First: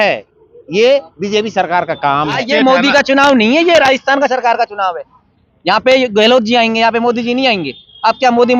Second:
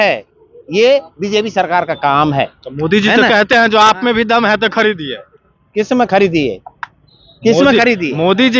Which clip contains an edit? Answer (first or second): first